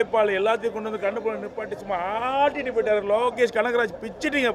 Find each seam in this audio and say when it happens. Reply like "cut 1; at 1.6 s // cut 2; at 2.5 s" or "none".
none